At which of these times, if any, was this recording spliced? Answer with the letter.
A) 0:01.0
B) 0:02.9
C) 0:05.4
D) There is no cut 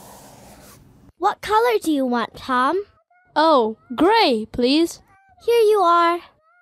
A